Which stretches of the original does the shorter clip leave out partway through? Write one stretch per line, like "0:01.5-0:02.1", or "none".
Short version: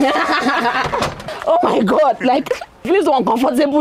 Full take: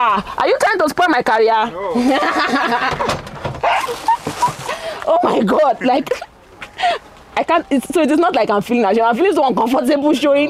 0:03.3-0:04.9
0:06.5-0:09.2